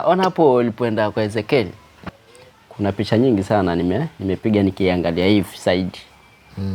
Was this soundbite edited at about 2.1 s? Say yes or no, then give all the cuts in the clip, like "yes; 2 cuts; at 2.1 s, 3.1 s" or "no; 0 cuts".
yes; 1 cut; at 2.1 s